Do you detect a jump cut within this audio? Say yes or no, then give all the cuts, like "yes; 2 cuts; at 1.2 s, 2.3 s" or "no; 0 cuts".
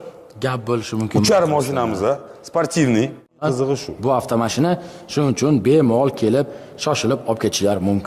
yes; 1 cut; at 3.4 s